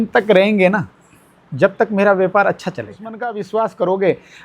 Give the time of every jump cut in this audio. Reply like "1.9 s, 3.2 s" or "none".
3.3 s